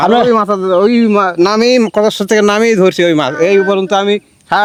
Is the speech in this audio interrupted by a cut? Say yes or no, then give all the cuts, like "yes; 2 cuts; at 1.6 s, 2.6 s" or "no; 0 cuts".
no; 0 cuts